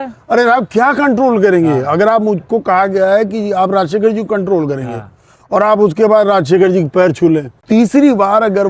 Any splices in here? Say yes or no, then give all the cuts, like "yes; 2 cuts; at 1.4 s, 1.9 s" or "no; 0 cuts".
yes; 1 cut; at 7.6 s